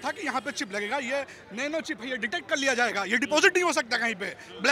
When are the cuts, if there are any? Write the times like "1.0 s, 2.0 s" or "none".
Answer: none